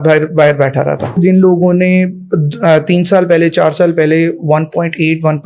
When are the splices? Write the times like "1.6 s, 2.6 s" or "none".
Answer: 1.2 s